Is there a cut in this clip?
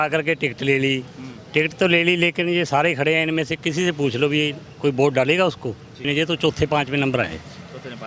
yes; 1 cut; at 6.0 s

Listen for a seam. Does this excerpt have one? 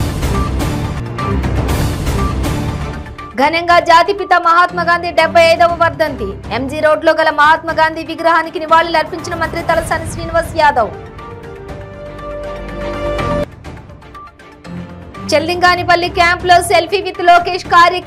no; 0 cuts

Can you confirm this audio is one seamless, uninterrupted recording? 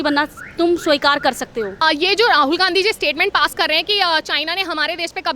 no; 1 cut; at 1.7 s

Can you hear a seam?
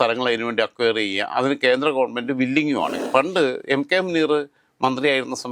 yes; 1 cut; at 2.9 s

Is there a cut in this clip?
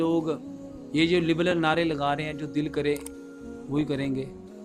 no; 0 cuts

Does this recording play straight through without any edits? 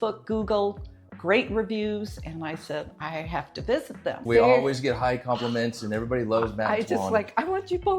no; 1 cut; at 4.2 s

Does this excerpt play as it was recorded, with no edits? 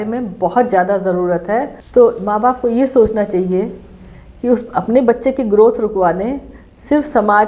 no; 1 cut; at 1.8 s

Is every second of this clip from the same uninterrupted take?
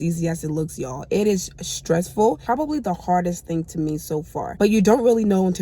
no; 2 cuts; at 2.4 s, 4.6 s

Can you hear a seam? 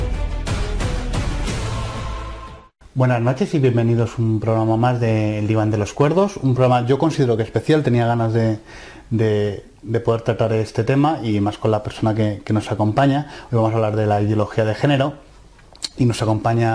no; 0 cuts

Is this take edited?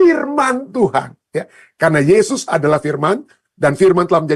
no; 0 cuts

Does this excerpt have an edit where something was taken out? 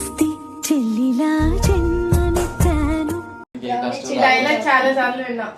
no; 0 cuts

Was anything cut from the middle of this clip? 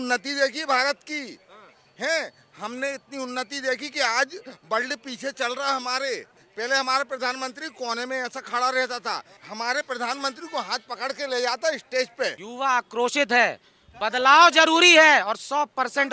yes; 3 cuts; at 6.4 s, 9.3 s, 12.4 s

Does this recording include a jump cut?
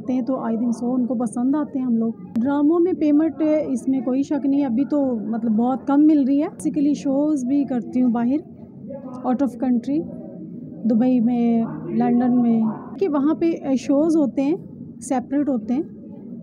yes; 3 cuts; at 2.3 s, 6.6 s, 13.0 s

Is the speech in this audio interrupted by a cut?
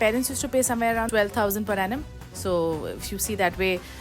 yes; 1 cut; at 1.1 s

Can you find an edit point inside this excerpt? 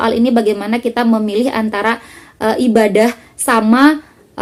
no; 0 cuts

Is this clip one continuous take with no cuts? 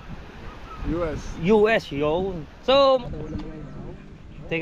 no; 1 cut; at 3.0 s

